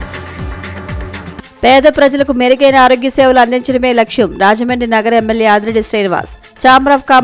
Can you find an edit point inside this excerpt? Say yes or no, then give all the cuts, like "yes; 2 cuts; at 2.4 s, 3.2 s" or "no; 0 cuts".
yes; 1 cut; at 1.0 s